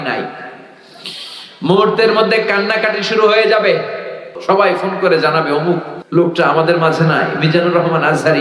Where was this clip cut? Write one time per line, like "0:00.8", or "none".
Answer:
0:04.3
0:05.9